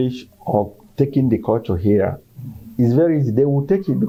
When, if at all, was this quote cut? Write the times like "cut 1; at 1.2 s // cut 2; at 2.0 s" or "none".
none

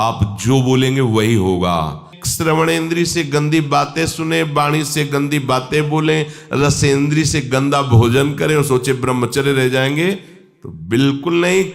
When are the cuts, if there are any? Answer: cut 1; at 2.2 s

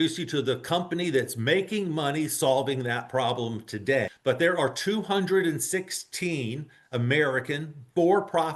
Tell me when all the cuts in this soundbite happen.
cut 1; at 4.1 s

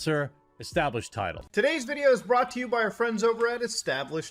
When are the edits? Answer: none

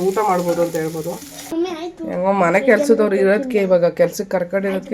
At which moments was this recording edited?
cut 1; at 1.5 s

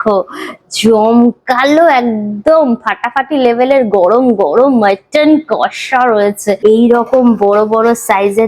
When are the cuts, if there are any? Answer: cut 1; at 6.6 s

